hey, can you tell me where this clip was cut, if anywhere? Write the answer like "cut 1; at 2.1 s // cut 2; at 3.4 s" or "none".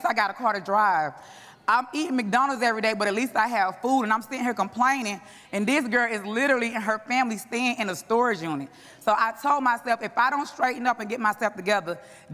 none

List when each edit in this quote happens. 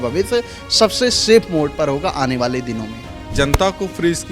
cut 1; at 3.3 s

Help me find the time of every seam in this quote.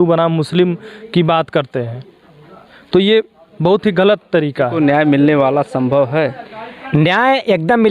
cut 1; at 4.7 s

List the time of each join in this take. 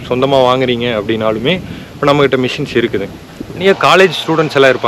cut 1; at 3.6 s

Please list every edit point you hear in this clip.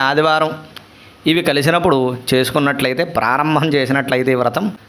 none

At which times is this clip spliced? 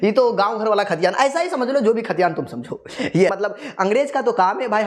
cut 1; at 3.3 s

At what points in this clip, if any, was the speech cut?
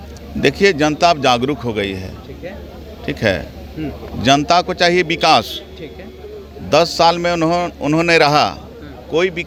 none

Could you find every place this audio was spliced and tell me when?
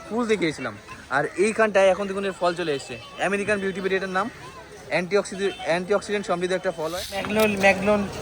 cut 1; at 7.3 s

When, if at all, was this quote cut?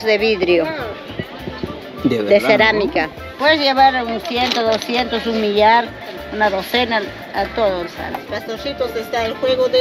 cut 1; at 3.3 s // cut 2; at 8.1 s

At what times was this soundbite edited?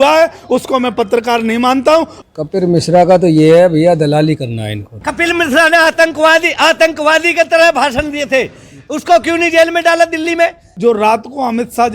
cut 1; at 2.1 s // cut 2; at 5.1 s // cut 3; at 10.7 s

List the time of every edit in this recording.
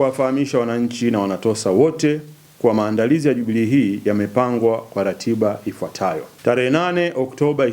cut 1; at 6.3 s

